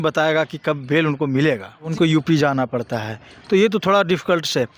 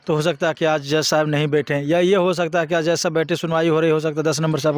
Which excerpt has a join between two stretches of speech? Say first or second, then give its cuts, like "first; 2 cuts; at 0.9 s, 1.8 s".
first; 1 cut; at 1.9 s